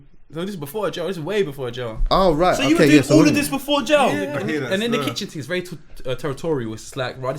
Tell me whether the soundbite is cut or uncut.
cut